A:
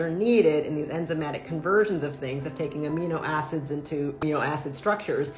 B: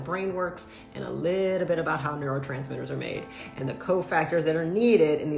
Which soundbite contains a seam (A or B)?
A